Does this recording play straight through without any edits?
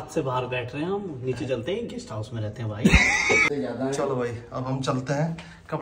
no; 1 cut; at 3.4 s

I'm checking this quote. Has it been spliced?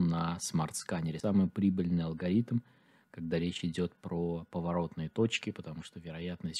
yes; 1 cut; at 1.2 s

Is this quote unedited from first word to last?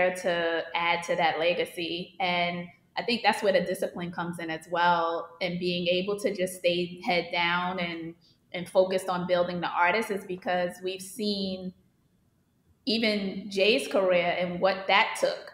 yes; 0 cuts

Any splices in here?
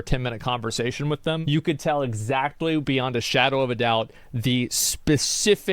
yes; 1 cut; at 1.4 s

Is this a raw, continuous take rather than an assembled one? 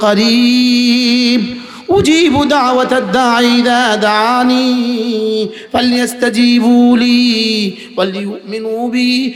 yes; 0 cuts

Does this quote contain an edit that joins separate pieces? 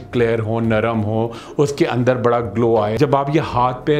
yes; 1 cut; at 2.9 s

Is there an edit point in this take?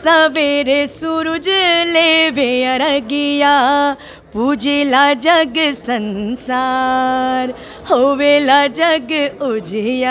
no; 0 cuts

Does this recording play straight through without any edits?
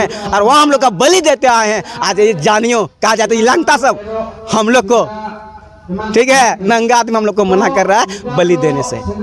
yes; 0 cuts

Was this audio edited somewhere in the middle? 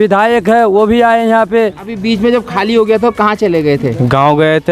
yes; 1 cut; at 1.9 s

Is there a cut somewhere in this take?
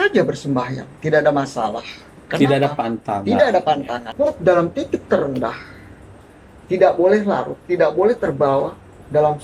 yes; 1 cut; at 4.1 s

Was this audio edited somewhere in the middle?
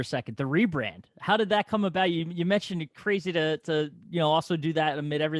no; 0 cuts

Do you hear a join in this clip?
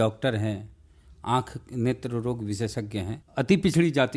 yes; 1 cut; at 3.2 s

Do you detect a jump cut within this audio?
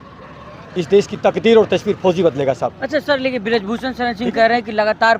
no; 0 cuts

